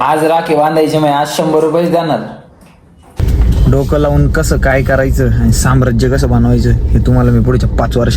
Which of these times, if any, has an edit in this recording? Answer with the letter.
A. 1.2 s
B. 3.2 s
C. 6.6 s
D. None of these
B